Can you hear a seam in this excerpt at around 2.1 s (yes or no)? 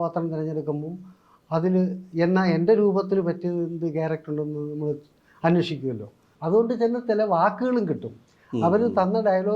no